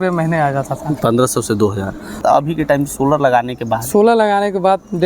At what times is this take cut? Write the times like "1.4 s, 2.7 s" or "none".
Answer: 2.2 s